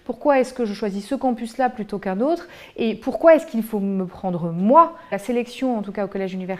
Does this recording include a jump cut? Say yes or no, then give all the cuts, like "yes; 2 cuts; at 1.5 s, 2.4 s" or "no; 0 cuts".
no; 0 cuts